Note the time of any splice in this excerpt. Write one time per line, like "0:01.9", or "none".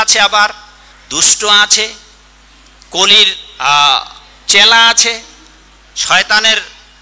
none